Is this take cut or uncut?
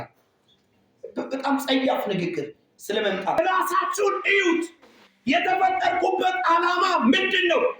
cut